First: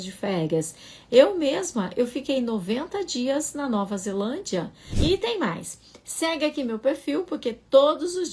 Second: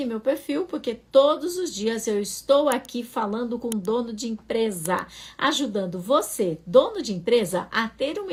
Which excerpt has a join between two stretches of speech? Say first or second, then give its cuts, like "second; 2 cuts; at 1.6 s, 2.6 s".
first; 1 cut; at 4.8 s